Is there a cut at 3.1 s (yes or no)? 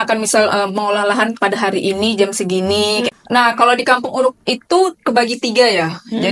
yes